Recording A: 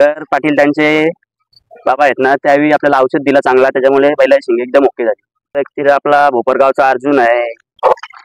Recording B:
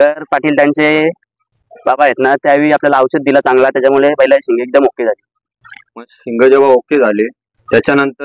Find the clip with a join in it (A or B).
A